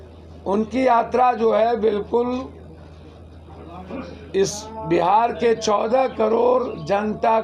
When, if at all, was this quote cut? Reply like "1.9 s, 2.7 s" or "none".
none